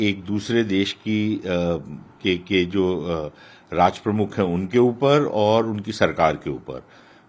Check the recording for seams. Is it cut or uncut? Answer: uncut